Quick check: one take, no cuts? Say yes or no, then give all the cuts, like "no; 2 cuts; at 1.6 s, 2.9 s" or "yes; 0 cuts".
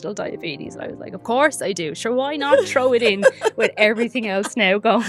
yes; 0 cuts